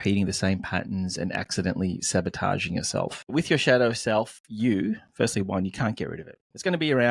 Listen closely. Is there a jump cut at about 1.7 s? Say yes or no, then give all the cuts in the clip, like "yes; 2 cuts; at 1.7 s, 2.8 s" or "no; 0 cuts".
no; 1 cut; at 3.3 s